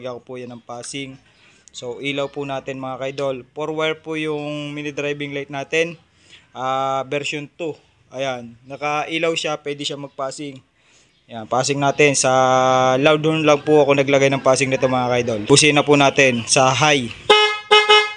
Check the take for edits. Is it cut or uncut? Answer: cut